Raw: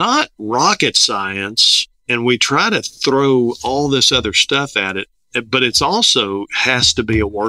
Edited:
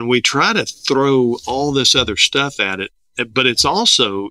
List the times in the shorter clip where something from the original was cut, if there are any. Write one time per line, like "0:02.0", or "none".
none